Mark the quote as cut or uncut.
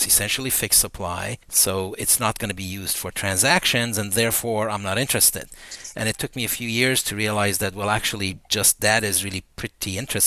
uncut